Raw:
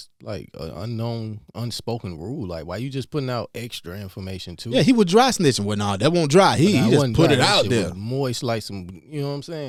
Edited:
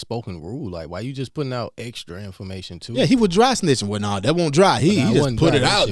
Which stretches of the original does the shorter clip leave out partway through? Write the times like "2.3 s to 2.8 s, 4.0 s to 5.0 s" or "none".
none